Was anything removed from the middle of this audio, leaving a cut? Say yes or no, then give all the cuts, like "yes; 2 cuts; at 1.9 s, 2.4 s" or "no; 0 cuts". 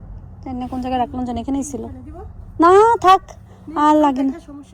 no; 0 cuts